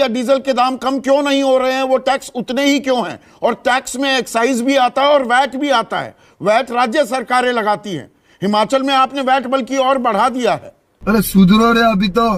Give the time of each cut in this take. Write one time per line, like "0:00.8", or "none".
none